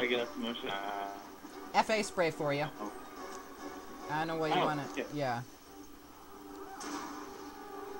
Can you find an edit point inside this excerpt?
yes; 1 cut; at 2.0 s

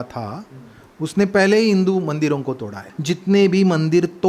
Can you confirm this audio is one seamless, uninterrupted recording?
no; 1 cut; at 2.8 s

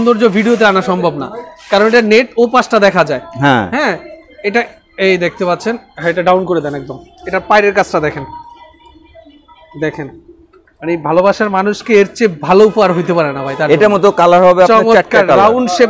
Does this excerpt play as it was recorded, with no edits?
yes; 0 cuts

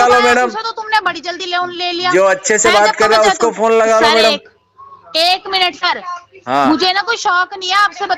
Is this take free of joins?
yes; 0 cuts

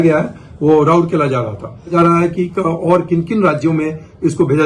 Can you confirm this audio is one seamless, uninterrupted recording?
no; 1 cut; at 1.9 s

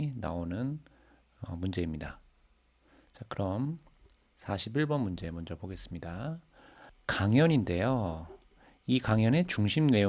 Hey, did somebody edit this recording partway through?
yes; 1 cut; at 6.9 s

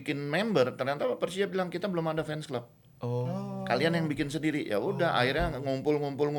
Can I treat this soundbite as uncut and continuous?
yes; 0 cuts

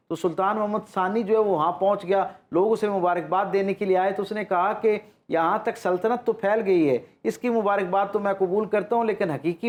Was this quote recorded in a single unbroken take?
yes; 0 cuts

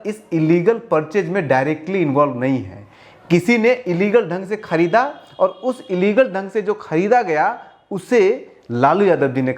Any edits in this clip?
no; 0 cuts

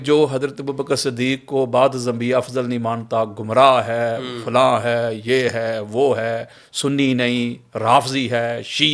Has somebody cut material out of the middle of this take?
no; 0 cuts

